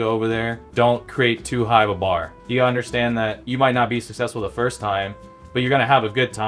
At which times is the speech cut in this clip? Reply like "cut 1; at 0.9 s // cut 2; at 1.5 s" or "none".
cut 1; at 0.9 s // cut 2; at 2.4 s // cut 3; at 3.4 s

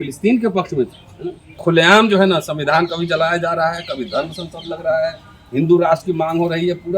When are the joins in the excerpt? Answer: cut 1; at 1.5 s

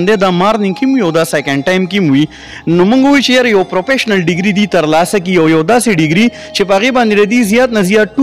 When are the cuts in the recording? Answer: none

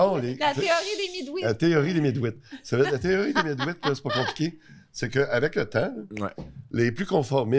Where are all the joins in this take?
none

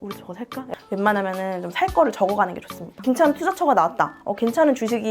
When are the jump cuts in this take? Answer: cut 1; at 0.7 s // cut 2; at 3.0 s

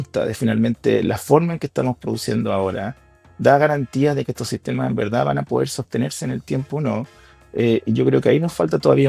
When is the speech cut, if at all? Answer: none

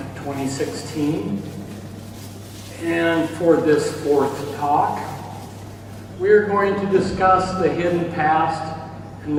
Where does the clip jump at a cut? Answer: none

